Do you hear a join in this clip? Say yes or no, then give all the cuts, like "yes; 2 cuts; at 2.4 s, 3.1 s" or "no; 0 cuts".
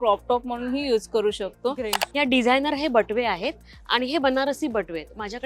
yes; 1 cut; at 2.0 s